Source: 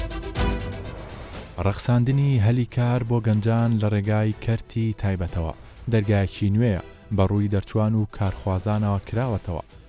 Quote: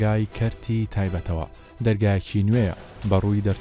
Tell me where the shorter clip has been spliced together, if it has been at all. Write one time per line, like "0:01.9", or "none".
none